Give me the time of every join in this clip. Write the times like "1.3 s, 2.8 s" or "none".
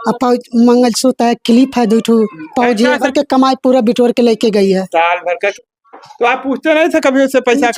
3.0 s, 5.5 s